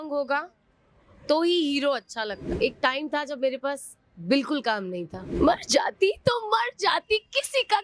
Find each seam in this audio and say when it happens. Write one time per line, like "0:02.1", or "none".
0:02.4
0:05.3